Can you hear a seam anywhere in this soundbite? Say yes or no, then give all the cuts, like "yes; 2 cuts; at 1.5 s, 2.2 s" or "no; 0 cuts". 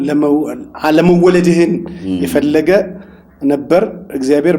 no; 0 cuts